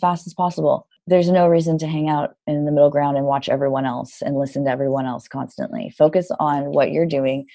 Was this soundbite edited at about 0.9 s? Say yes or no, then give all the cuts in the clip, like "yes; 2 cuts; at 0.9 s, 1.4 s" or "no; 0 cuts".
yes; 1 cut; at 0.9 s